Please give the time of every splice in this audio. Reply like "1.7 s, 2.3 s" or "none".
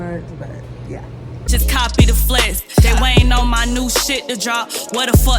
1.4 s